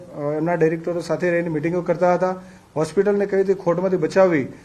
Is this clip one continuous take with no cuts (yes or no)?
yes